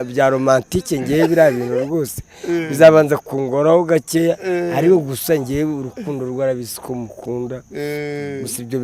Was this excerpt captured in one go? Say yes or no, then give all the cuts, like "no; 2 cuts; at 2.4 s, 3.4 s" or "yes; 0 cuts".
yes; 0 cuts